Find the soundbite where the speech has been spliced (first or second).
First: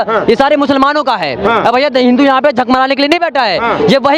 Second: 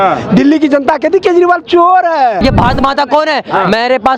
second